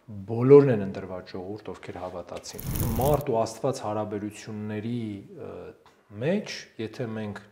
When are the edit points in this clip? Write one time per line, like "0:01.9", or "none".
0:02.8